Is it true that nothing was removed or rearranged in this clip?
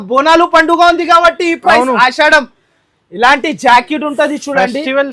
yes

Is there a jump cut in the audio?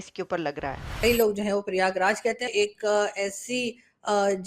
yes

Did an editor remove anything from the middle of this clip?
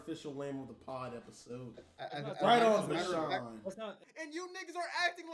yes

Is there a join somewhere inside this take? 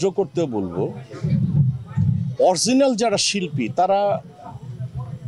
no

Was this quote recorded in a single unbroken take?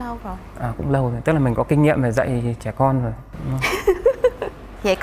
yes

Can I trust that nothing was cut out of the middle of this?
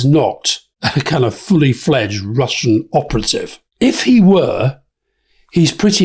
yes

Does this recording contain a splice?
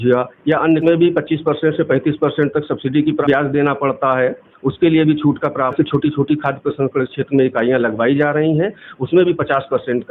yes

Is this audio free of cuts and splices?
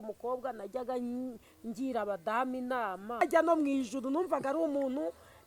no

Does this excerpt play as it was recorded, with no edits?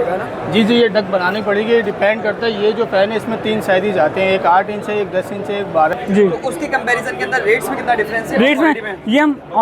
no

